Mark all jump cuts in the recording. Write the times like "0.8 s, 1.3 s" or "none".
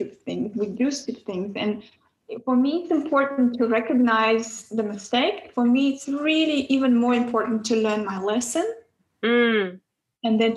none